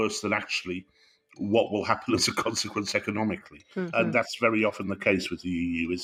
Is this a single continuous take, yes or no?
yes